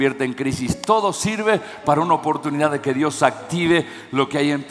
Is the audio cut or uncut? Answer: uncut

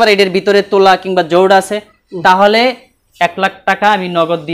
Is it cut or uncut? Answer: uncut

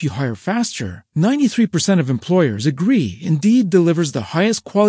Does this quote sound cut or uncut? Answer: uncut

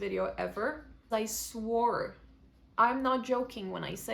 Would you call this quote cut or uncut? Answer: cut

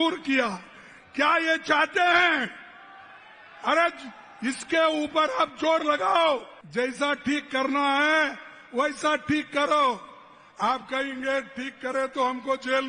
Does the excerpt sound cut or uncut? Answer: cut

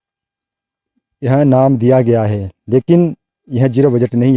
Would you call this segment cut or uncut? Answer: uncut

